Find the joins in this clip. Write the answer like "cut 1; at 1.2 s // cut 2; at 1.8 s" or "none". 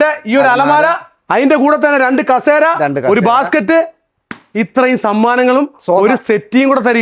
none